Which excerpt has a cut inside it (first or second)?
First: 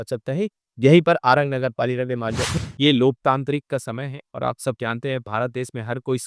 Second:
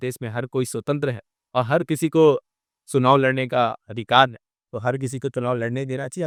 first